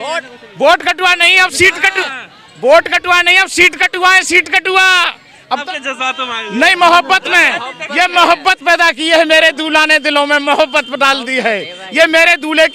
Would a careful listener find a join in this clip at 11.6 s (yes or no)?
no